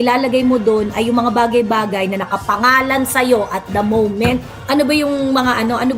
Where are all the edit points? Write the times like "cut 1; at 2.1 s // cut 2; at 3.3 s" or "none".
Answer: none